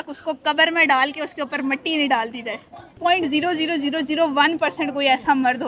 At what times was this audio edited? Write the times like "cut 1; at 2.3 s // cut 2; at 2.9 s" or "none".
cut 1; at 2.9 s

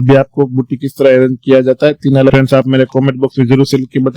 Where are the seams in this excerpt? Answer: cut 1; at 2.3 s

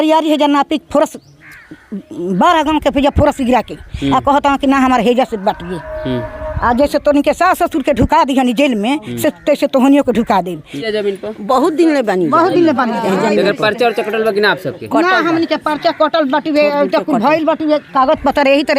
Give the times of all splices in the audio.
cut 1; at 10.8 s

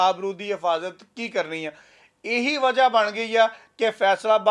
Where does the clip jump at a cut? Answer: none

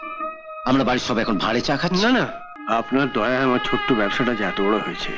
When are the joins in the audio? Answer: cut 1; at 2.5 s

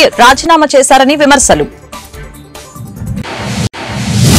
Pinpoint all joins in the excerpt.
cut 1; at 1.8 s // cut 2; at 3.6 s

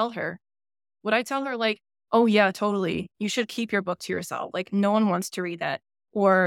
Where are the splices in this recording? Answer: none

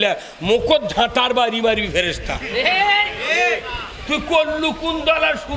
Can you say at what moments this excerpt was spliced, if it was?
none

